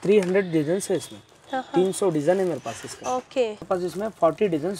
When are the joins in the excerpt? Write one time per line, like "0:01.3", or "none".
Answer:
0:03.6